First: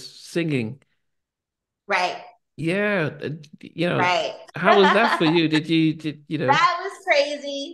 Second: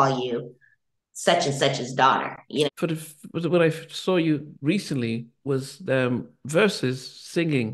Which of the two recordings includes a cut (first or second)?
second